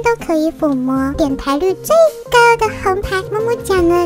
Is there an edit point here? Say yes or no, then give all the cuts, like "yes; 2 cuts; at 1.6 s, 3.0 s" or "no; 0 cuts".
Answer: yes; 2 cuts; at 1.1 s, 3.3 s